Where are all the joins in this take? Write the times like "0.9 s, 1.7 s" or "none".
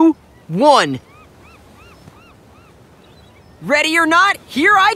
1.2 s, 3.6 s